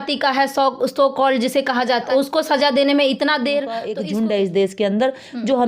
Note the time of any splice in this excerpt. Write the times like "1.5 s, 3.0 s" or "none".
3.9 s